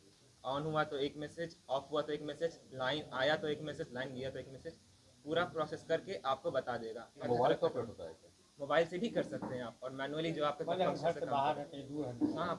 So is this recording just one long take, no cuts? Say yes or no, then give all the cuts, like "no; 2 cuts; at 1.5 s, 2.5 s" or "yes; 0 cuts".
no; 1 cut; at 7.3 s